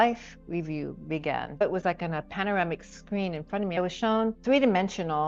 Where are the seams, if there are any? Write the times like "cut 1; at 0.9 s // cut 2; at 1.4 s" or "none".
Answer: cut 1; at 1.6 s // cut 2; at 3.8 s